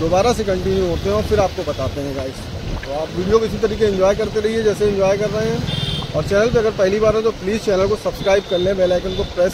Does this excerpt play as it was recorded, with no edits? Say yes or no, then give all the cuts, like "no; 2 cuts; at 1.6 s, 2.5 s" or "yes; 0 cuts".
yes; 0 cuts